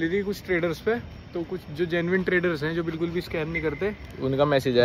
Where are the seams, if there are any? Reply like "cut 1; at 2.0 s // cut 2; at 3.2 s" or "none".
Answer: none